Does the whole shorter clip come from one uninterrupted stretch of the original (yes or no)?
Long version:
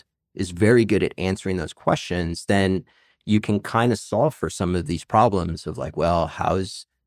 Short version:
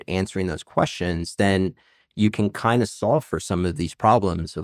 yes